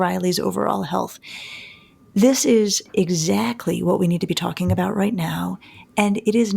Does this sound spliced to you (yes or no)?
yes